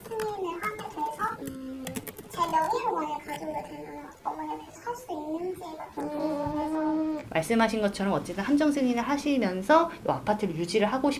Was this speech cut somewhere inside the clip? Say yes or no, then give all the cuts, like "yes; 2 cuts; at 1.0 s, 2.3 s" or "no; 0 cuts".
yes; 1 cut; at 7.2 s